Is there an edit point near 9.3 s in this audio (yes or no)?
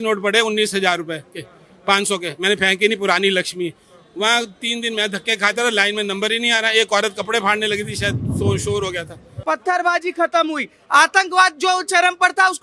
yes